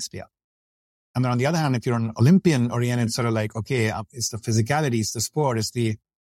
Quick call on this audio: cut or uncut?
cut